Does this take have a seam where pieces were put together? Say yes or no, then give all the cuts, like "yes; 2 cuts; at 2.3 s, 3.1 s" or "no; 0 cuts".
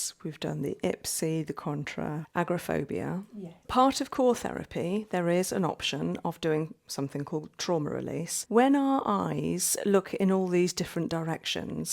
yes; 3 cuts; at 2.2 s, 3.7 s, 8.3 s